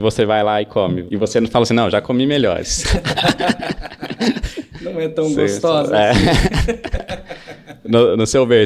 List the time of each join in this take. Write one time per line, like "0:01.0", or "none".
0:01.0